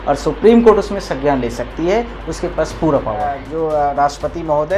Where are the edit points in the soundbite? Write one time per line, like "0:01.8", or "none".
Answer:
0:03.4